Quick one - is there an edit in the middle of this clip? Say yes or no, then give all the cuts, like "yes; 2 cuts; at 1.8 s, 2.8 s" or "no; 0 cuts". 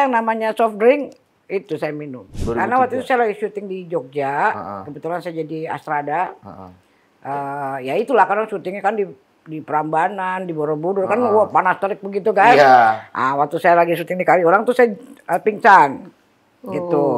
yes; 1 cut; at 2.3 s